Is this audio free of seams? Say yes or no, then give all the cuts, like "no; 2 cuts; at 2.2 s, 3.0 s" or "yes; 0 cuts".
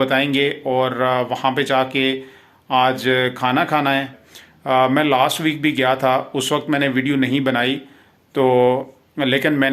yes; 0 cuts